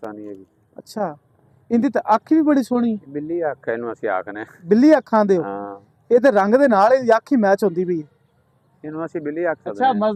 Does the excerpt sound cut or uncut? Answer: uncut